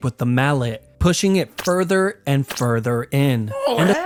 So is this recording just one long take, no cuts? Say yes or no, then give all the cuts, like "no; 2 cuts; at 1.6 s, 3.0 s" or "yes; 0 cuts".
yes; 0 cuts